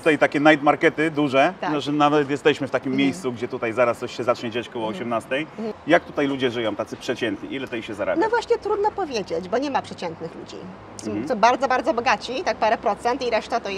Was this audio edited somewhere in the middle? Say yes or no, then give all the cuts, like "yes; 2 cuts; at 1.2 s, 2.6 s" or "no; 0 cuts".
yes; 1 cut; at 5.7 s